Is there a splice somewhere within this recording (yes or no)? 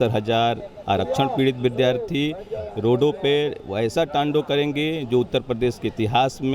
no